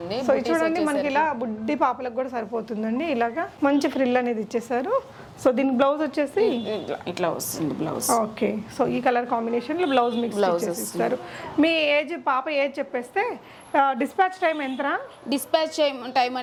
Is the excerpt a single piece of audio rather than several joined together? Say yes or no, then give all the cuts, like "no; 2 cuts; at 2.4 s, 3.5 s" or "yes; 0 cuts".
yes; 0 cuts